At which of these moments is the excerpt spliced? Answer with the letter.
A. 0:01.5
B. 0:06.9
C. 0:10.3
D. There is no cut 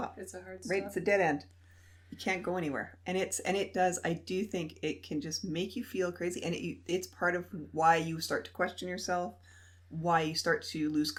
D